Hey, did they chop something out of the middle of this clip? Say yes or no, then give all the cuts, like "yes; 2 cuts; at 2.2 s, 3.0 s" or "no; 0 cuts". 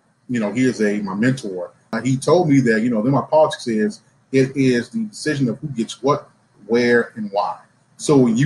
yes; 1 cut; at 2.0 s